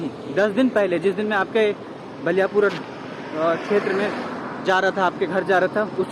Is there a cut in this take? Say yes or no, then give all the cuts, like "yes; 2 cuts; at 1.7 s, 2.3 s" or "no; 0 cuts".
no; 0 cuts